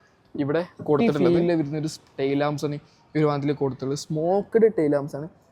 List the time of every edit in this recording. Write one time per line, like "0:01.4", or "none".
0:01.0